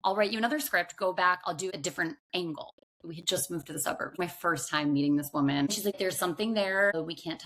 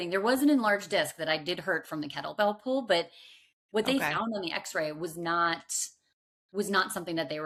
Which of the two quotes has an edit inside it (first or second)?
first